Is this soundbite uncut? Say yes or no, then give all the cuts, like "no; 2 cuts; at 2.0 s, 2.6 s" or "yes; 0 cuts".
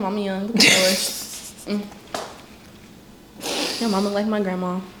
yes; 0 cuts